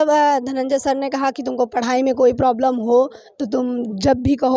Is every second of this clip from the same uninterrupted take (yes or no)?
yes